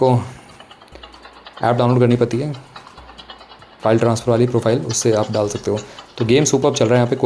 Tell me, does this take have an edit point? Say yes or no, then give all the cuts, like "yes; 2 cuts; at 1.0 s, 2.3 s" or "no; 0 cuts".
no; 0 cuts